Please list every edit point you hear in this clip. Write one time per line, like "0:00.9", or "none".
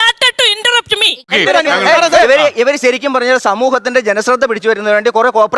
0:01.2